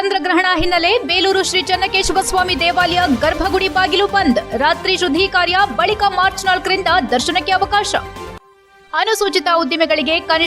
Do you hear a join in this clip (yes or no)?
no